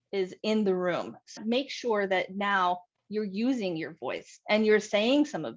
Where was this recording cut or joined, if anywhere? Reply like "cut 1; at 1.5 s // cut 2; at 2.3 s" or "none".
cut 1; at 1.3 s